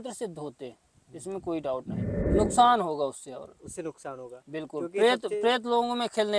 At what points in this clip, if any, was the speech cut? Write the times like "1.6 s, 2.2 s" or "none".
2.3 s